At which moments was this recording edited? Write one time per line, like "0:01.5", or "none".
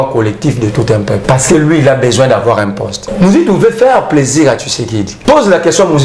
0:01.2
0:03.0
0:05.1